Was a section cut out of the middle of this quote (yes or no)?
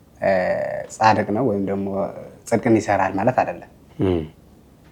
yes